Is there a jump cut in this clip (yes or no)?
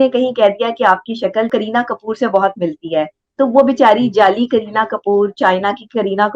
yes